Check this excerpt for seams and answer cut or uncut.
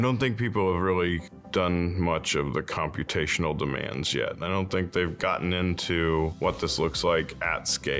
cut